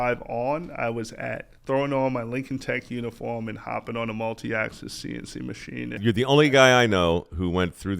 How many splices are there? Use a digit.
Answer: 1